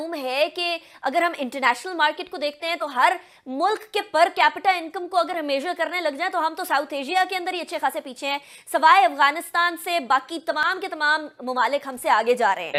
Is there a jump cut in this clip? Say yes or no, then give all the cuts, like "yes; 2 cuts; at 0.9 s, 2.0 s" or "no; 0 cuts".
no; 0 cuts